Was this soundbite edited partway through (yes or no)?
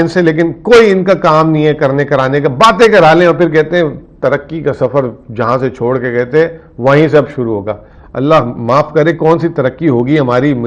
no